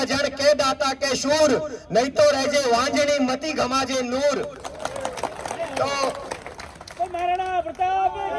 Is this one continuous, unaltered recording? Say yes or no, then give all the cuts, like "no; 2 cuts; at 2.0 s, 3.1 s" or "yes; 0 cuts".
yes; 0 cuts